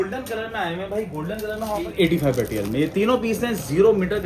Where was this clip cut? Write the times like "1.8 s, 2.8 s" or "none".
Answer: 1.9 s